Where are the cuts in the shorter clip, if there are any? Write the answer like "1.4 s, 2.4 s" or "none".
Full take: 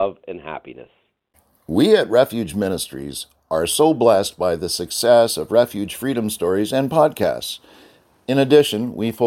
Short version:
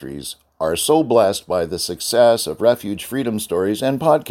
none